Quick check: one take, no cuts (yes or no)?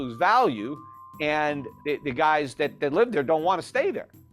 no